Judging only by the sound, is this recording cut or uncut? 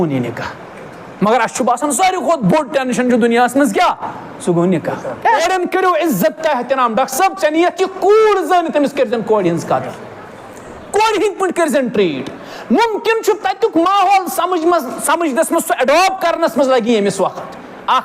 cut